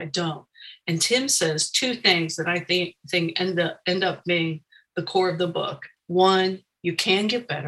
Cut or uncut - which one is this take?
cut